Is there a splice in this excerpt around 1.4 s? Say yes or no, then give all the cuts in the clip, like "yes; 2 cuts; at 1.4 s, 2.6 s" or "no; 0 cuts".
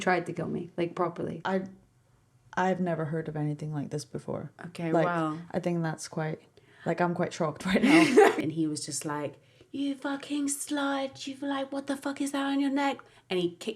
yes; 2 cuts; at 1.4 s, 8.4 s